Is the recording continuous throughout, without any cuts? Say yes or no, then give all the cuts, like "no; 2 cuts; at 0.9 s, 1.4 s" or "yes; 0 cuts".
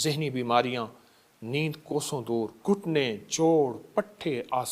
no; 1 cut; at 2.6 s